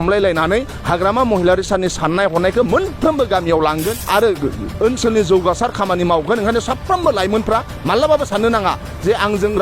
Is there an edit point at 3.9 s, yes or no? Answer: yes